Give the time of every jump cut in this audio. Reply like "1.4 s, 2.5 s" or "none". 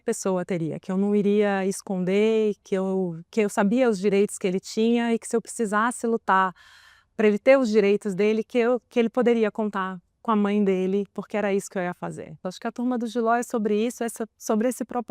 12.5 s